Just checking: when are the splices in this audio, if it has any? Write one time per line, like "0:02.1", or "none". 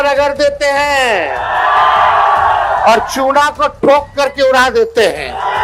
none